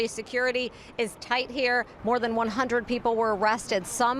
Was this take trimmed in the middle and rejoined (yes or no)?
yes